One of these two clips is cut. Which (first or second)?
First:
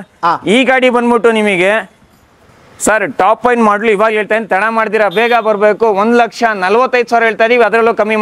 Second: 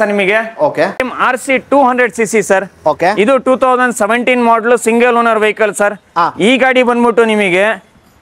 second